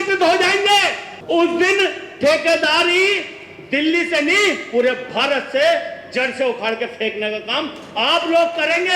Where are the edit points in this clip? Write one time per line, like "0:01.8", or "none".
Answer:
0:01.1